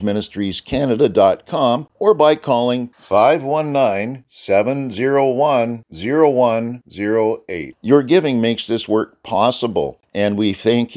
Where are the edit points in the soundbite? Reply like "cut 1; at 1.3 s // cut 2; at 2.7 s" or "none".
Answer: cut 1; at 1.9 s // cut 2; at 10.0 s